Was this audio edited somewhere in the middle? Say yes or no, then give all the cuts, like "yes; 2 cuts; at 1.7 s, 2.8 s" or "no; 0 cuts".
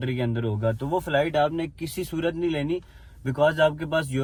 no; 0 cuts